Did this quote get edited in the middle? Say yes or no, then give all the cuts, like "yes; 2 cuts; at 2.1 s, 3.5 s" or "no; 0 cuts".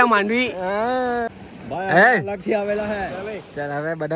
yes; 1 cut; at 1.3 s